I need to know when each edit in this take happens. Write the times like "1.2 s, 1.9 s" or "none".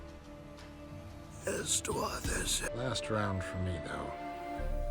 2.7 s